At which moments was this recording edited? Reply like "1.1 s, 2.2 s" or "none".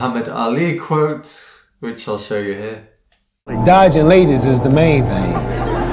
none